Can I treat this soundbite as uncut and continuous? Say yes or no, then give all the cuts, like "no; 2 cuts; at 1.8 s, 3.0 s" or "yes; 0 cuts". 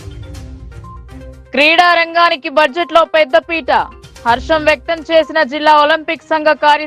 yes; 0 cuts